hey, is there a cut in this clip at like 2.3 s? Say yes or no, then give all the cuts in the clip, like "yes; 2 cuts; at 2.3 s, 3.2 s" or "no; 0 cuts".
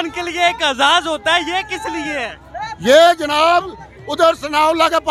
no; 0 cuts